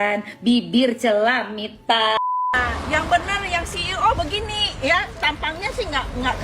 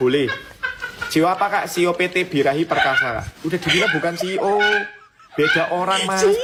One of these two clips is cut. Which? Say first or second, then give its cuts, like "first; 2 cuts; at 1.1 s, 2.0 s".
first; 1 cut; at 2.2 s